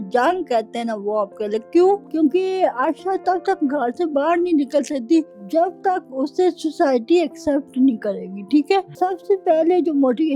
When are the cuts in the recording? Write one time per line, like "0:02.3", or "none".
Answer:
0:02.1
0:05.4
0:08.9